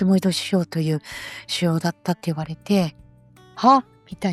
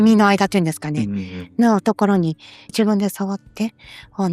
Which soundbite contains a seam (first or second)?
second